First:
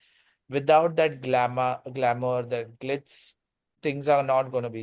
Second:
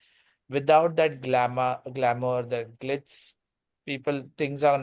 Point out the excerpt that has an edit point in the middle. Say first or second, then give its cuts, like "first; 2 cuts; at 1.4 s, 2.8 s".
first; 1 cut; at 3.7 s